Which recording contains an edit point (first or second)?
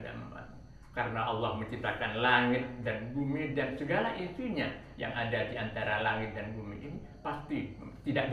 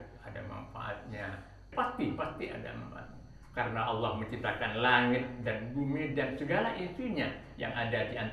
second